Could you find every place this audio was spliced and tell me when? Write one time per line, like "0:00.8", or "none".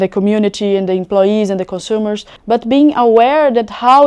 0:02.3